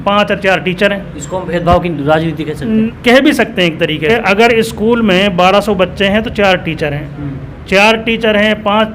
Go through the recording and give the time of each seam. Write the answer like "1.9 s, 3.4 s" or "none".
2.9 s, 4.1 s